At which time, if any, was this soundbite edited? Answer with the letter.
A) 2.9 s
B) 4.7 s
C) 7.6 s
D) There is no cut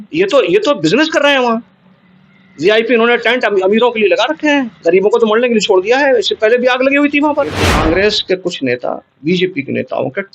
C